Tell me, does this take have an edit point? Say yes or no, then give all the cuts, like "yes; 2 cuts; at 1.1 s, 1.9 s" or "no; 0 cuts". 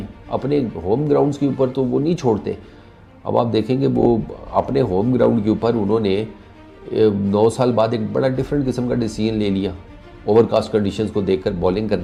no; 0 cuts